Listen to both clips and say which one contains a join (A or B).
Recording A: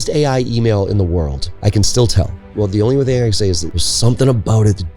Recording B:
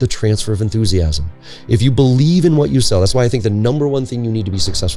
A